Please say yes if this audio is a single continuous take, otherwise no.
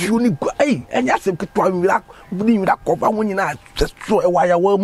yes